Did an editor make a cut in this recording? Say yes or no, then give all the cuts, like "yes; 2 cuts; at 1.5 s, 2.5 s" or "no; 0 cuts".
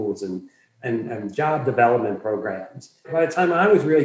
yes; 1 cut; at 3.1 s